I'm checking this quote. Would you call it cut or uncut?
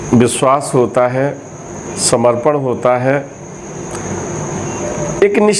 uncut